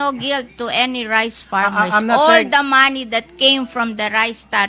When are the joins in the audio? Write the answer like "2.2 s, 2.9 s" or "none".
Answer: none

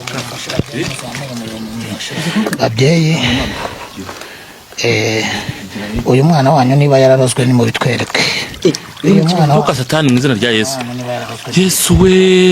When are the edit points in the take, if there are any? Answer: 2.1 s

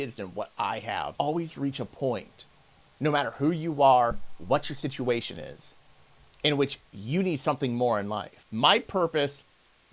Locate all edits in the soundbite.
1.1 s, 8.4 s

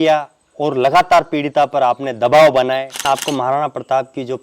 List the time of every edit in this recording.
3.0 s

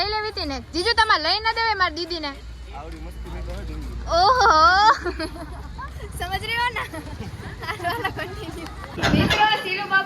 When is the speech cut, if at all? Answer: 4.4 s, 8.8 s

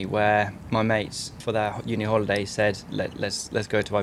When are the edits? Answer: 1.0 s

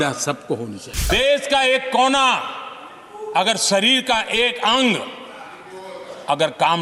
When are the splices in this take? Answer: 1.1 s

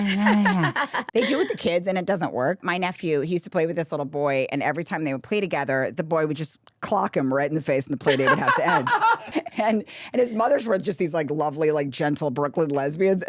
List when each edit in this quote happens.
1.0 s, 2.6 s, 9.2 s

